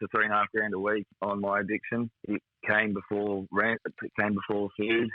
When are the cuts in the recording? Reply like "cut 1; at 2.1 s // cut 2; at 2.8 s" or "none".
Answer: cut 1; at 1.1 s // cut 2; at 2.2 s